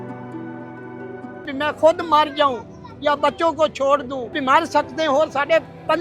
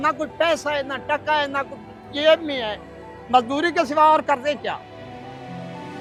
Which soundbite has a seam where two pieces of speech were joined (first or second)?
first